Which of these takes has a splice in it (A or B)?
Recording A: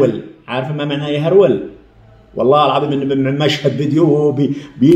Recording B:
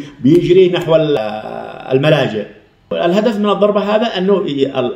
B